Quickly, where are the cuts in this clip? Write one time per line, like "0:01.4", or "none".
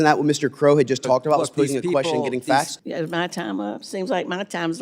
0:02.8